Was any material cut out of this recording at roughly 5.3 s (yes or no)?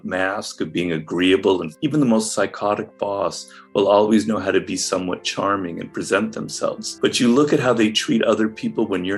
no